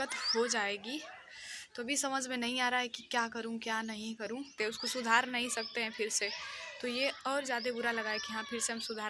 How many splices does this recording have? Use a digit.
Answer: 1